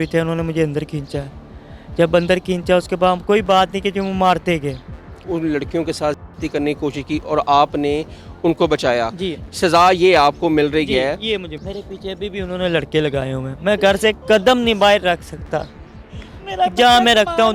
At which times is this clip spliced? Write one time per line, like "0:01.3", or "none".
0:05.2
0:11.5